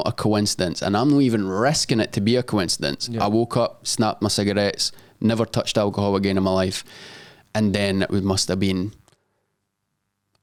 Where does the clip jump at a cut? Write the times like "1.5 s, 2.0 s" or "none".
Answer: none